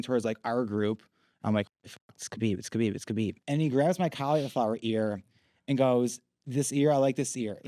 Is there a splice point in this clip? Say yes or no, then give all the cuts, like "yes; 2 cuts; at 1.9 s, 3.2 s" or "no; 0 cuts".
yes; 1 cut; at 3.4 s